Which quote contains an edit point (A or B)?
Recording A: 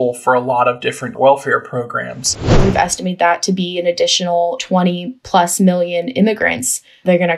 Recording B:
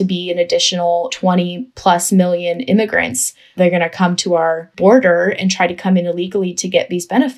A